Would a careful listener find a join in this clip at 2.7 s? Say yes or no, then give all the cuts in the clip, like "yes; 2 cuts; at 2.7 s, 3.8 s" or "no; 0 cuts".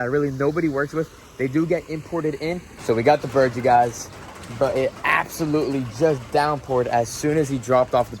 yes; 1 cut; at 2.7 s